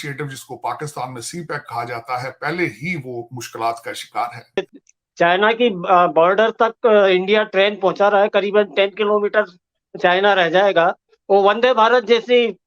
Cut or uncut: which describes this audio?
cut